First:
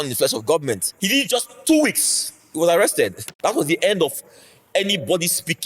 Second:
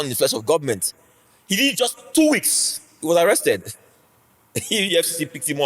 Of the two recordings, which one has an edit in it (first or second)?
first